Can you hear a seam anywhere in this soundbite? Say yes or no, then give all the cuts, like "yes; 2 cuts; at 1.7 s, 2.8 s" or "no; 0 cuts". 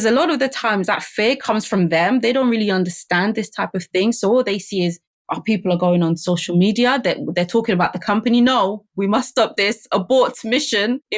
no; 0 cuts